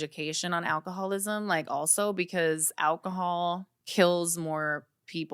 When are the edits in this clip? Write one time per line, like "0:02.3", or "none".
0:03.8